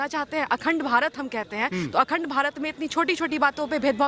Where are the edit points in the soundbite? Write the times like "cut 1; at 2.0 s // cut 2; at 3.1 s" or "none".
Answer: none